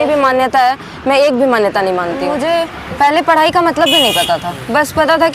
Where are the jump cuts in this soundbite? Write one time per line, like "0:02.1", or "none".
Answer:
0:02.2